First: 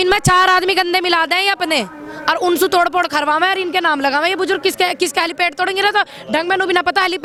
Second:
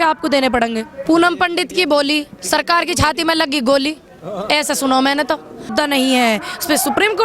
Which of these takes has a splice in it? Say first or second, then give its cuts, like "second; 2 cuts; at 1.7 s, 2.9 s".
second; 2 cuts; at 0.9 s, 5.7 s